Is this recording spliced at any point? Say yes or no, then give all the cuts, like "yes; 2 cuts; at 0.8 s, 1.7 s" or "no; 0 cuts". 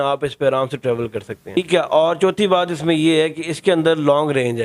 yes; 1 cut; at 1.6 s